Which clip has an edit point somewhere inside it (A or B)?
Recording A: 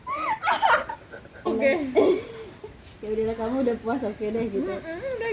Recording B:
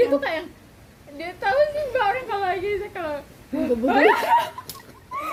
A